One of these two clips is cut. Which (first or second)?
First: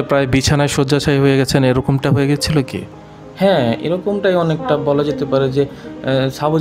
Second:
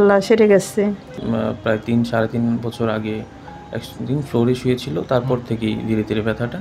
second